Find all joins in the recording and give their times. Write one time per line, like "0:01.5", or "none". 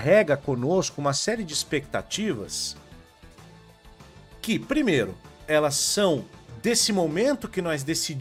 none